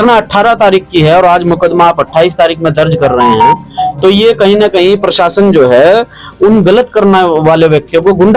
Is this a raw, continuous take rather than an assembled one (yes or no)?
yes